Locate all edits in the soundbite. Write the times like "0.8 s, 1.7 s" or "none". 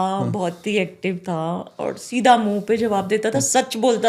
none